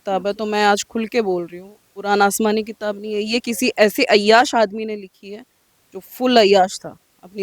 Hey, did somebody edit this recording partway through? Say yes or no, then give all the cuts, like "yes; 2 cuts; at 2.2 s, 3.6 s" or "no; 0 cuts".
no; 0 cuts